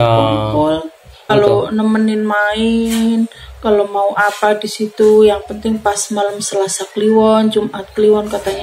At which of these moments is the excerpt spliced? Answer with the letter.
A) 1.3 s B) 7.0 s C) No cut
A